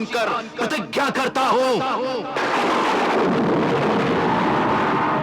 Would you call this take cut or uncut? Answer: uncut